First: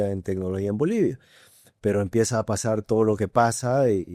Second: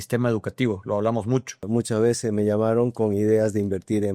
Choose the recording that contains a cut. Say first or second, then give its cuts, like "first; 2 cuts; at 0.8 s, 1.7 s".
second; 1 cut; at 1.6 s